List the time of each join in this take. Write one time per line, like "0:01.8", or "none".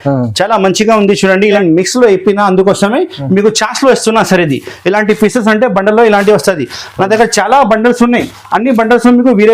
0:01.6